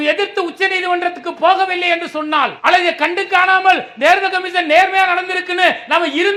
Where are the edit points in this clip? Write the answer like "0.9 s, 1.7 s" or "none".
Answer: none